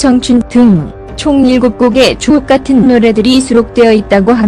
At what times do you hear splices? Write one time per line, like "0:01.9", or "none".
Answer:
0:01.5